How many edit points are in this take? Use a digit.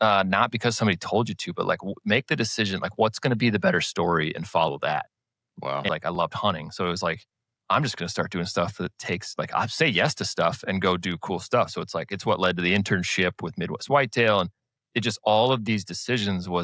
1